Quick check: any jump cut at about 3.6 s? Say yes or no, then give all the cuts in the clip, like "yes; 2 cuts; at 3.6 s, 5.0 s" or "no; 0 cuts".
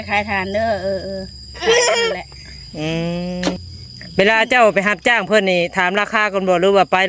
yes; 1 cut; at 3.6 s